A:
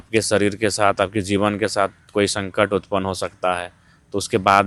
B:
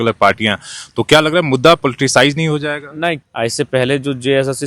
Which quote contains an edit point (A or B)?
B